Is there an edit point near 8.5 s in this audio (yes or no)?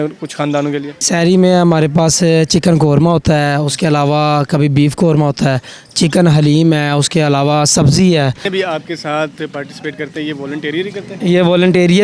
yes